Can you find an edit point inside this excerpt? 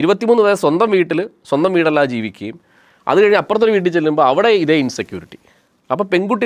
no; 0 cuts

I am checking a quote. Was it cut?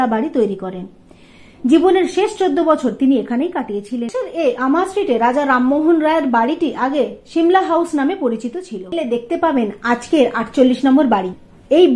yes; 2 cuts; at 4.1 s, 8.8 s

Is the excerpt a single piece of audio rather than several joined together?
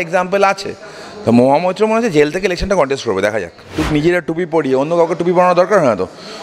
no; 1 cut; at 3.8 s

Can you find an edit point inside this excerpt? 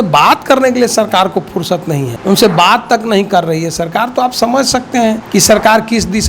yes; 2 cuts; at 2.1 s, 5.2 s

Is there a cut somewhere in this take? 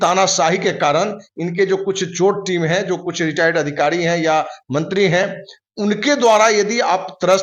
no; 0 cuts

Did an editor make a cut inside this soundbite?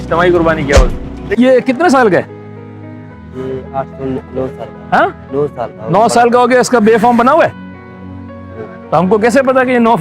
yes; 1 cut; at 1.2 s

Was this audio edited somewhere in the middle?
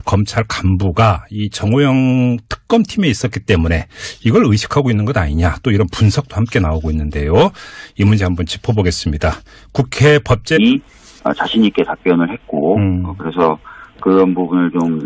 no; 0 cuts

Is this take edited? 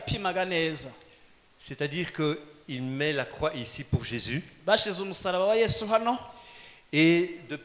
no; 0 cuts

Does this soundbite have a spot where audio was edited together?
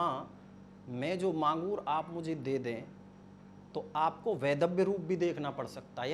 no; 0 cuts

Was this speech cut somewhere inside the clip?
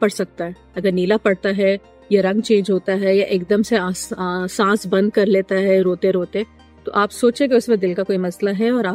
no; 0 cuts

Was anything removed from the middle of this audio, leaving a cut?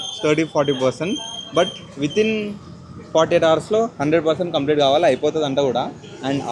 no; 0 cuts

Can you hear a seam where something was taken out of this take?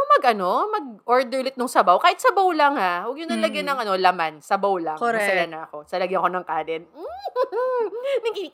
no; 0 cuts

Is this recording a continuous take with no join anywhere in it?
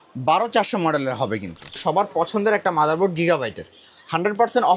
no; 1 cut; at 1.8 s

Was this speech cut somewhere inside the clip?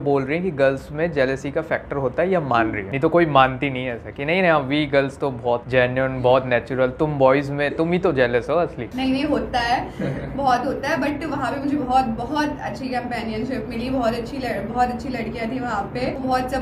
no; 0 cuts

